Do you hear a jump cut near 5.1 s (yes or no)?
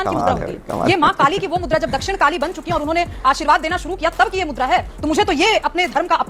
yes